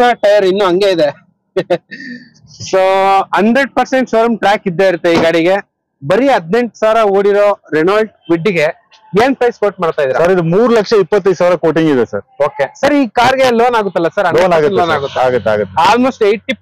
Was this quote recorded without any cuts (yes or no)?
yes